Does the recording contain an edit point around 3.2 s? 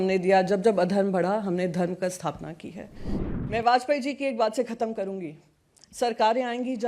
yes; 1 cut; at 3.2 s

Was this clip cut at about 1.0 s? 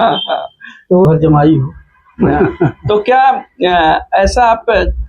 yes; 1 cut; at 1.0 s

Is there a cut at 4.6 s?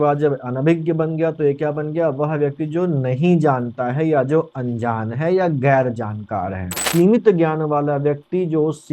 no; 1 cut; at 6.8 s

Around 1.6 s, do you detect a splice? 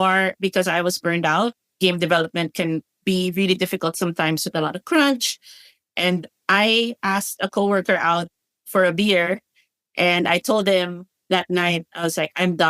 yes; 1 cut; at 1.6 s

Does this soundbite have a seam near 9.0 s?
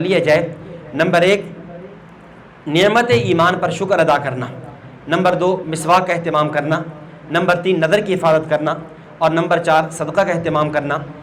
no; 0 cuts

